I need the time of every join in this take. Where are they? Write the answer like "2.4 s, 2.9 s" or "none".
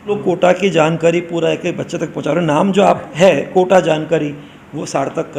none